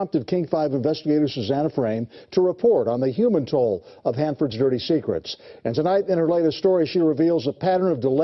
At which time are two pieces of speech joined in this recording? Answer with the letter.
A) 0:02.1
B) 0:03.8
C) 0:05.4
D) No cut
C